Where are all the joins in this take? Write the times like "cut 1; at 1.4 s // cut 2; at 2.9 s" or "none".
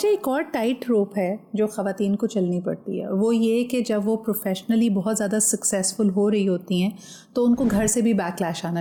none